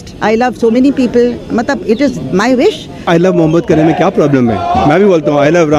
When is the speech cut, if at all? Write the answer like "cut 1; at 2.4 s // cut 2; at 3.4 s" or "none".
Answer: cut 1; at 3.0 s